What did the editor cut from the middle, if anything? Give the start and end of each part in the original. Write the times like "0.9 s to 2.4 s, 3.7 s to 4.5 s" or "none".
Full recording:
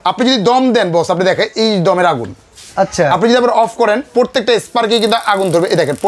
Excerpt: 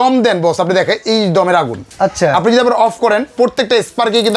2.3 s to 2.6 s